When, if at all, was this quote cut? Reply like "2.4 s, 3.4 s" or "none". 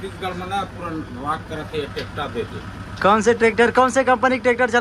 none

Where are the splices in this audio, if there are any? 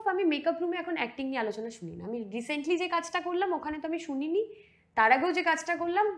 none

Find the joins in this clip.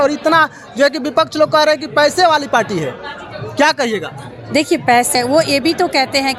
5.1 s

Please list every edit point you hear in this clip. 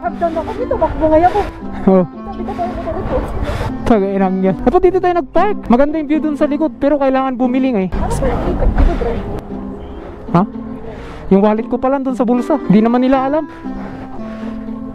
none

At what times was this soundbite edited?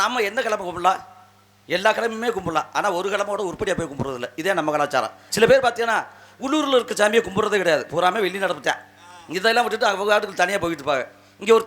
5.3 s

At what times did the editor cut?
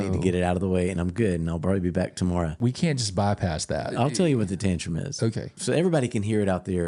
2.6 s, 3.9 s, 5.6 s

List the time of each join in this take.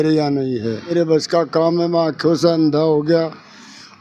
0.9 s

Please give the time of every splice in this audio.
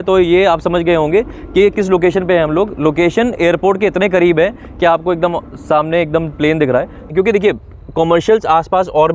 7.1 s

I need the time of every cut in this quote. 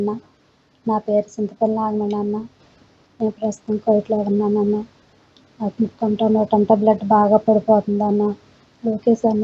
none

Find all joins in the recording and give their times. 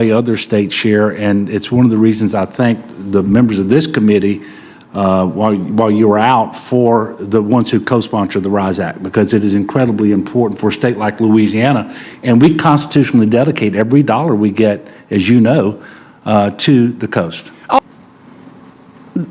17.8 s

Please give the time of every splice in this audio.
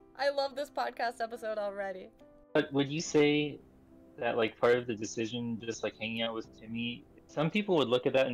2.5 s, 7.1 s

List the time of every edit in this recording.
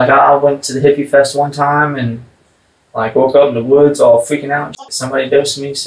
4.8 s

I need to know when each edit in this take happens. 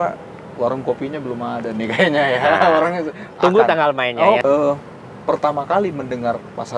4.4 s

